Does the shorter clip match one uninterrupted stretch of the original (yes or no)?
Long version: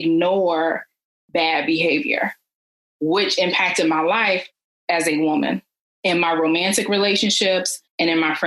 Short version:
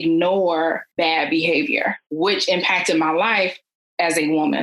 no